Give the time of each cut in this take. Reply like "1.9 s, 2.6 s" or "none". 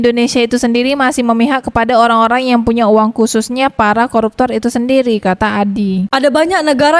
6.1 s